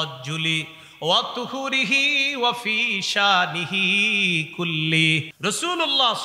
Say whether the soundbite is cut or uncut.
cut